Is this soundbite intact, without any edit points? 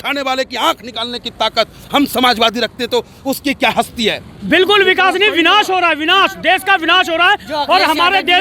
no; 1 cut; at 4.3 s

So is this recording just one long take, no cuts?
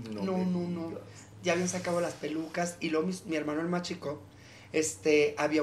yes; 0 cuts

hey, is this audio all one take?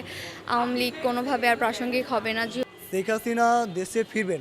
no; 1 cut; at 2.6 s

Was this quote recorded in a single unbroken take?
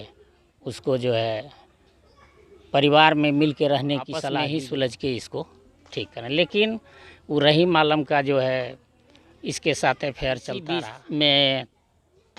no; 2 cuts; at 4.3 s, 10.9 s

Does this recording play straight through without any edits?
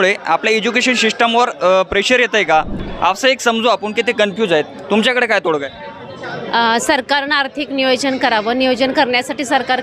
no; 1 cut; at 2.8 s

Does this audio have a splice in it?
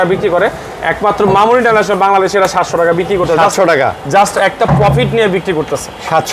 no; 0 cuts

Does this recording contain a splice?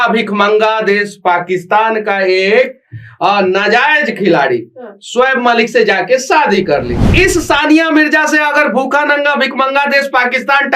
yes; 1 cut; at 7.1 s

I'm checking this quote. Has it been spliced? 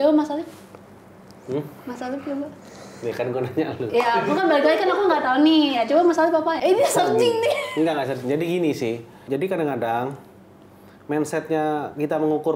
no; 0 cuts

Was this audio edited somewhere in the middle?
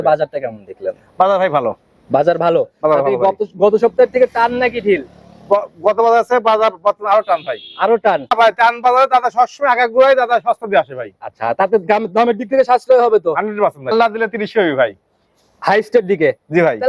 yes; 2 cuts; at 8.3 s, 13.8 s

